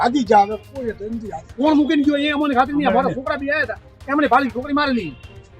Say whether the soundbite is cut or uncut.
cut